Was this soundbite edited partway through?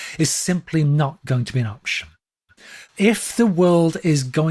no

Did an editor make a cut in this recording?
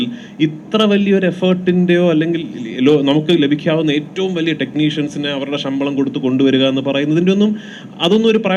no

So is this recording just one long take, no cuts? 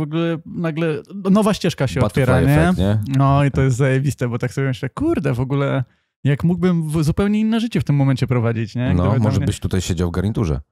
yes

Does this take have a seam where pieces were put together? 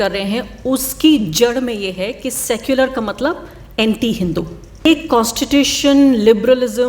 yes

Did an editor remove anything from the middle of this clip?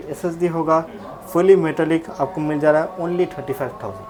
no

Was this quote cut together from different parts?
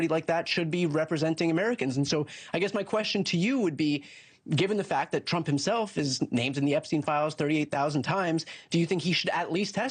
no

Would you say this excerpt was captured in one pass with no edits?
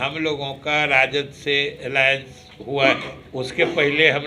no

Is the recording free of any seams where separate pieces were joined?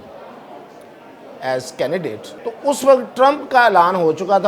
no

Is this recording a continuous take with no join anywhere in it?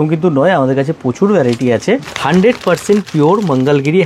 no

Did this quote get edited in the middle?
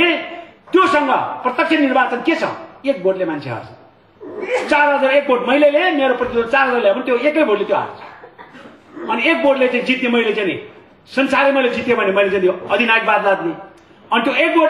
no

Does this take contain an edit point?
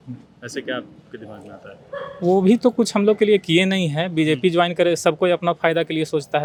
no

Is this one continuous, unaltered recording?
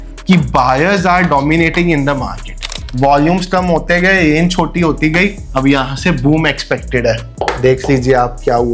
no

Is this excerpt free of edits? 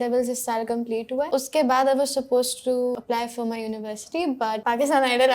no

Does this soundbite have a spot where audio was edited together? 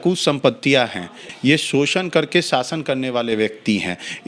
yes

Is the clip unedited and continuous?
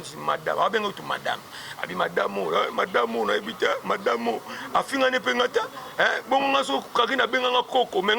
yes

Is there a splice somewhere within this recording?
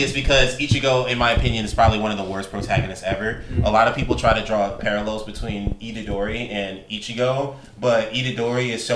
no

